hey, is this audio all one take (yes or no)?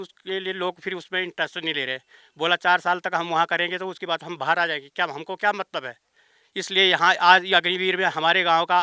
yes